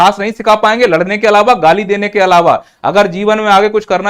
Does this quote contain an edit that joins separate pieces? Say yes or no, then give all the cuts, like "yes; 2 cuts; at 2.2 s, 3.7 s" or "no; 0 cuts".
no; 0 cuts